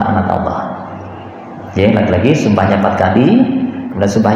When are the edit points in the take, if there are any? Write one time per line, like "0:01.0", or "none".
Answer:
none

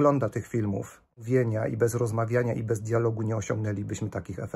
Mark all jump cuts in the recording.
0:01.2

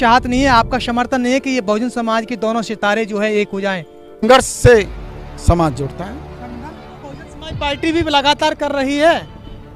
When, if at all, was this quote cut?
0:04.2

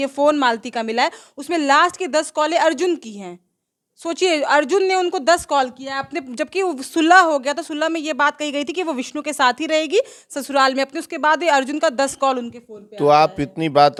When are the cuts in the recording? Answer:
none

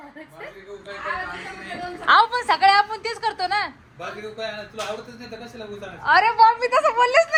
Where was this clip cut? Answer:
none

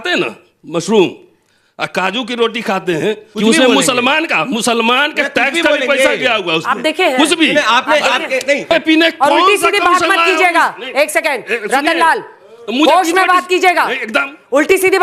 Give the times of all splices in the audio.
0:03.3
0:08.6

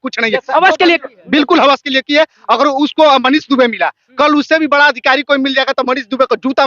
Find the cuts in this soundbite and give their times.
none

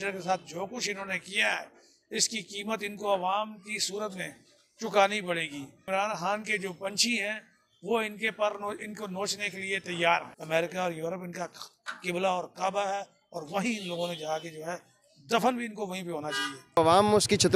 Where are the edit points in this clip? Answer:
0:05.8
0:10.3
0:16.8

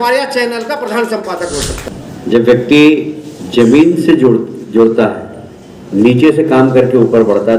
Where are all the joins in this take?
0:01.8

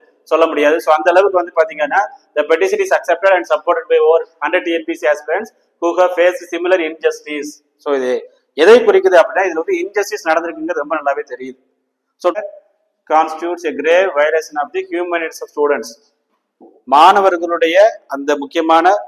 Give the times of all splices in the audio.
0:12.4

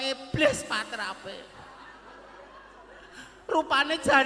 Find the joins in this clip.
none

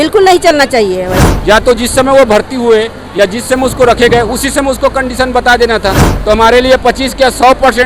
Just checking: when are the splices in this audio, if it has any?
0:01.3
0:06.1

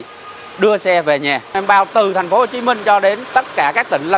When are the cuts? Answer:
0:01.6
0:03.2

